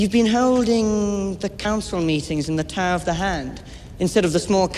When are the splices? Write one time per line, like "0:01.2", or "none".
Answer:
none